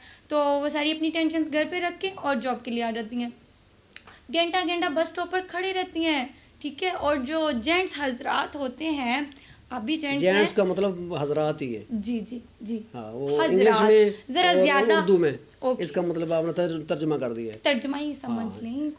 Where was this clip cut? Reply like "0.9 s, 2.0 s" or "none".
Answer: none